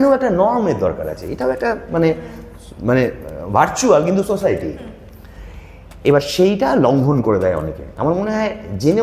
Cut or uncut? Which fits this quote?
uncut